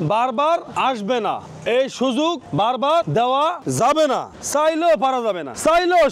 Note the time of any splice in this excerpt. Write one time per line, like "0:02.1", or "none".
none